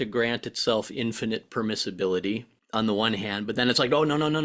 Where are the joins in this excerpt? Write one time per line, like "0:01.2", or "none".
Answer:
0:02.5